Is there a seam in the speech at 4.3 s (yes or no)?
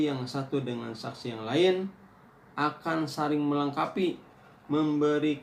no